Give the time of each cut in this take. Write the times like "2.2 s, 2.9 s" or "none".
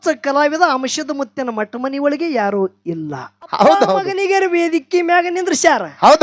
4.0 s

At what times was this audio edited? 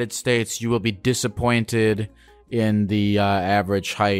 none

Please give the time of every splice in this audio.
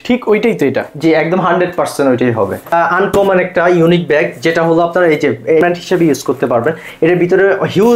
2.7 s, 5.6 s

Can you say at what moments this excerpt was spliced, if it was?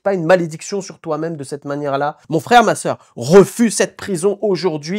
2.2 s

